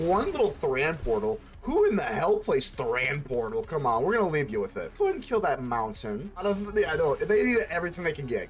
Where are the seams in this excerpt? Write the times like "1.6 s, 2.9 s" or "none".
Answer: 4.9 s, 6.4 s